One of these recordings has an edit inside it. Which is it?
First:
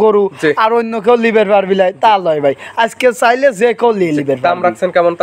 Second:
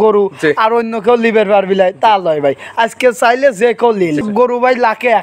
second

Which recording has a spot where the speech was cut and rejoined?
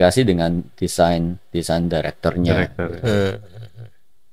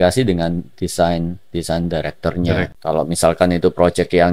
second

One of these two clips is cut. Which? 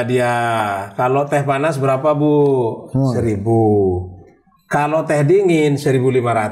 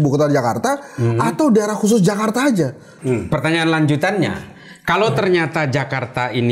second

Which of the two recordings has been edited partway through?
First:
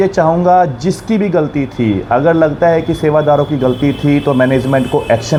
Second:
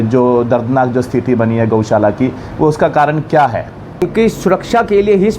second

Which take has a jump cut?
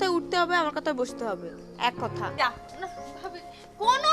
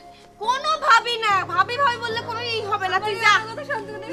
first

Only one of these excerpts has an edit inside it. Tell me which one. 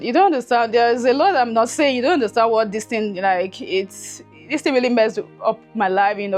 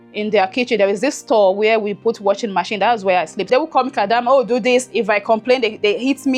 second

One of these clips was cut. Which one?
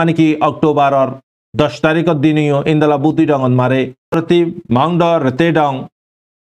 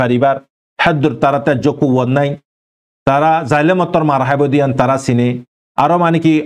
first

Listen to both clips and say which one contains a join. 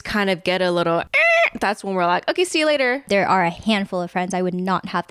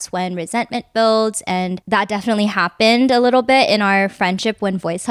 first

